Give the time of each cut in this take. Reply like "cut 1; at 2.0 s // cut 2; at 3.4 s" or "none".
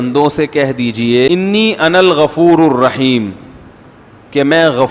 cut 1; at 1.3 s